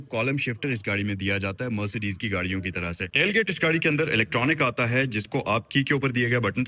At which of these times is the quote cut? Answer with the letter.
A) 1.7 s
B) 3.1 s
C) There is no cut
B